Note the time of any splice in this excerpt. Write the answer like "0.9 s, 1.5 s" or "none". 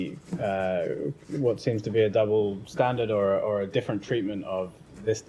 none